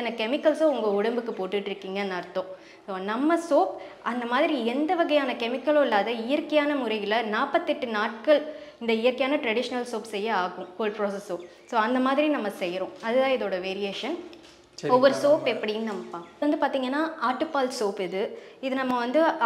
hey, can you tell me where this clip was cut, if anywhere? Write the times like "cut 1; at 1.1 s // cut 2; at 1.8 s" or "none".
none